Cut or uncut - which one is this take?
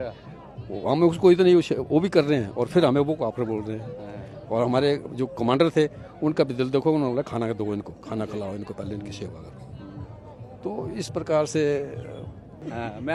uncut